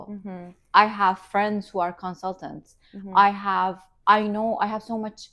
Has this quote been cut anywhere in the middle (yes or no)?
no